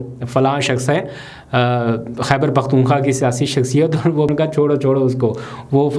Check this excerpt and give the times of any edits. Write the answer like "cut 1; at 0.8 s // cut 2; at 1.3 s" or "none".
cut 1; at 4.3 s